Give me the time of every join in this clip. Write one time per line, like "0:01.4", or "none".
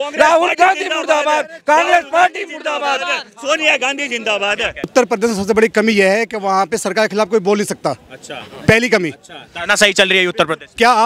0:04.9